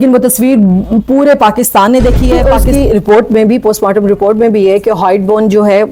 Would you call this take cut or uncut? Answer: cut